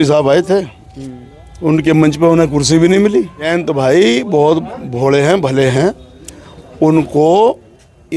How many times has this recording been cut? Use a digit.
1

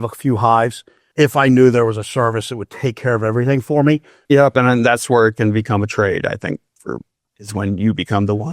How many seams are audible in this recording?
1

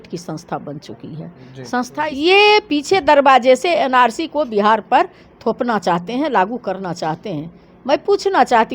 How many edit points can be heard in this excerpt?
1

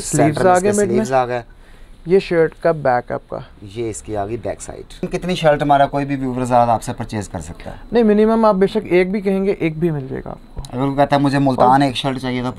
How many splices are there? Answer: 1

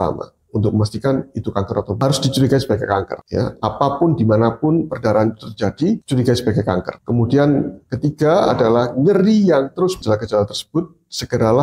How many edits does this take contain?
2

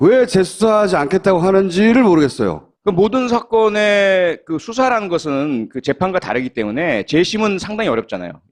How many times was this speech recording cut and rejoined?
1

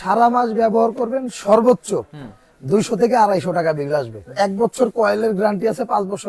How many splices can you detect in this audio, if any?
1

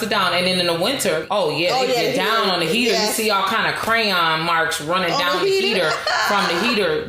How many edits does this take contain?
1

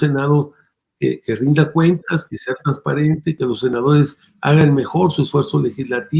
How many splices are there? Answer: 1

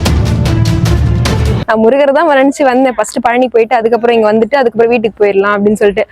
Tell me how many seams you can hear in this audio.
1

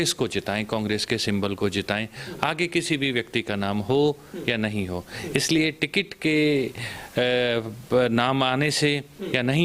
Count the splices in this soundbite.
0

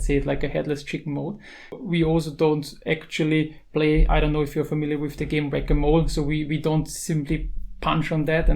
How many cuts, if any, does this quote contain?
1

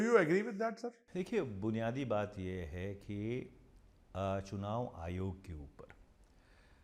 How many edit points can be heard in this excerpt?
0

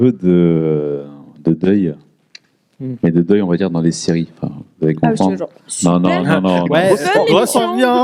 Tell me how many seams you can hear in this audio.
0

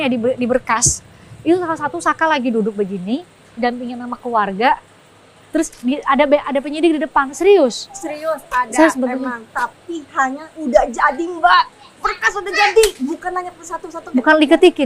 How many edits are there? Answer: 0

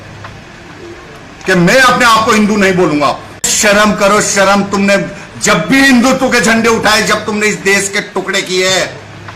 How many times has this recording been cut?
1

